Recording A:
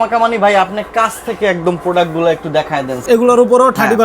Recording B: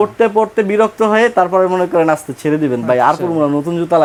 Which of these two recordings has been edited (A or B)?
A